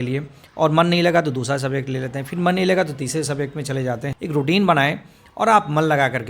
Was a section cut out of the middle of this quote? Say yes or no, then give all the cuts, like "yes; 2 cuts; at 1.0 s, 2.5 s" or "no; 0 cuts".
yes; 1 cut; at 4.1 s